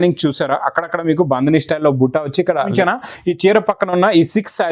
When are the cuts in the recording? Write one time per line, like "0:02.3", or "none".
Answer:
0:02.7